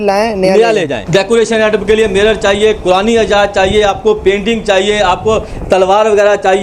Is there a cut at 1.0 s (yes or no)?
yes